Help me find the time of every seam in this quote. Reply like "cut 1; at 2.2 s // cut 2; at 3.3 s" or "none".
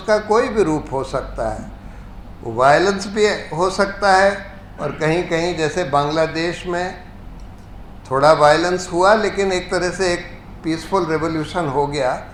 none